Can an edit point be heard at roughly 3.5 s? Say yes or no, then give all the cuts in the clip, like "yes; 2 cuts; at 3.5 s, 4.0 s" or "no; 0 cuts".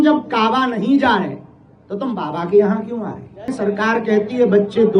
yes; 1 cut; at 3.5 s